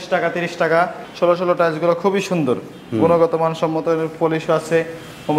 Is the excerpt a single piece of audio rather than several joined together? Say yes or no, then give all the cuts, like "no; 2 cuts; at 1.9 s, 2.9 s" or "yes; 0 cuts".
no; 1 cut; at 1.0 s